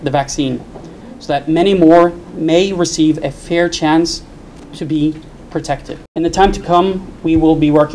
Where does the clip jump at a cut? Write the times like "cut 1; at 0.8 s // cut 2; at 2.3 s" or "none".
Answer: cut 1; at 6.0 s